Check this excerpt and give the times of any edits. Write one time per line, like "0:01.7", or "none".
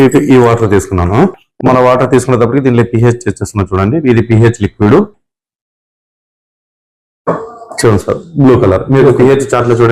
none